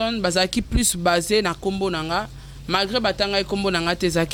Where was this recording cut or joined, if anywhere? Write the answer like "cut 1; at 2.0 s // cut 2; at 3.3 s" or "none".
none